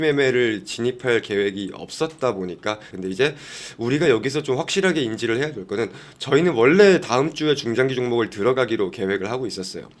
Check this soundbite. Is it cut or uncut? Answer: cut